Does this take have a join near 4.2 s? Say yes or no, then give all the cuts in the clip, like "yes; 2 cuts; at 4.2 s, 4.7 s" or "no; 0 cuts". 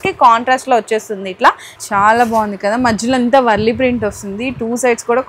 no; 1 cut; at 1.7 s